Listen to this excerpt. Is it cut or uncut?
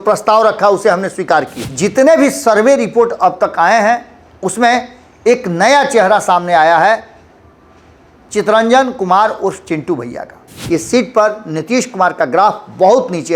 cut